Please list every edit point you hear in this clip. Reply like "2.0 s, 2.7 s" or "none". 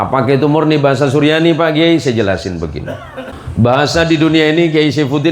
3.3 s